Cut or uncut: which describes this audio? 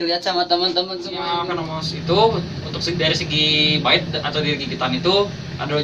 cut